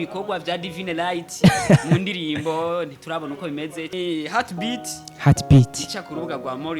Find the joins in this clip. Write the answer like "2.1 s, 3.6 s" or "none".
3.9 s